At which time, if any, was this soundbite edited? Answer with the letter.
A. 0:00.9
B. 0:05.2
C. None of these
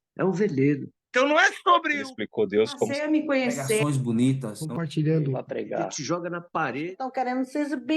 A